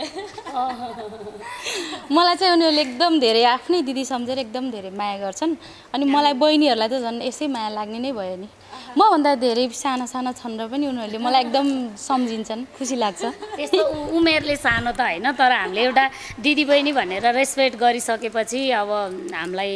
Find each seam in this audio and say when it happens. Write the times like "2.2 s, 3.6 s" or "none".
none